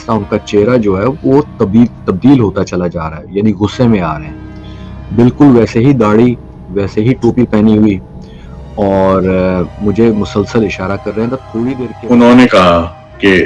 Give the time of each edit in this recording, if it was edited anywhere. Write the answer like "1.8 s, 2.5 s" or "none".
11.9 s